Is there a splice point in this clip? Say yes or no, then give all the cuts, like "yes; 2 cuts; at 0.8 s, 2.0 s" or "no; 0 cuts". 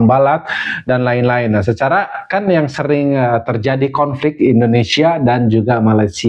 no; 0 cuts